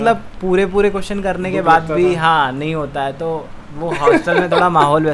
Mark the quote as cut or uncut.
uncut